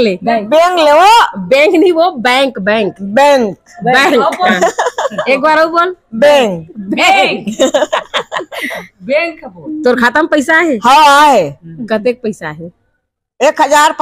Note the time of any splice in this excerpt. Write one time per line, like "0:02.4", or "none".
none